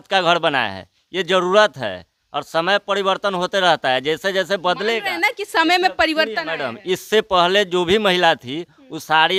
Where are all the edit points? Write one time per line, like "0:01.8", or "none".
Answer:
none